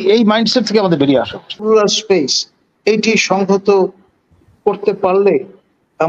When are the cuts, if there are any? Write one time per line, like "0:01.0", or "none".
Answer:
0:01.6

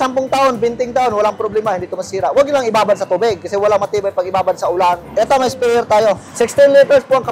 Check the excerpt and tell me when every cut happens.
0:05.1
0:06.3

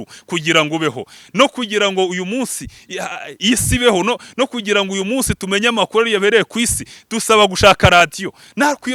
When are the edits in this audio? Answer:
none

